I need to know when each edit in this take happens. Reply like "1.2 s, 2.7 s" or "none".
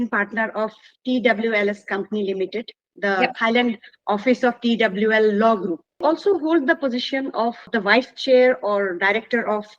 6.0 s, 7.6 s